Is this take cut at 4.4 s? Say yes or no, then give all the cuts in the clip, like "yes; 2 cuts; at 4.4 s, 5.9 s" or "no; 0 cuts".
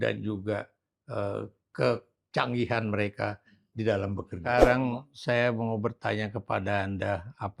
yes; 1 cut; at 4.4 s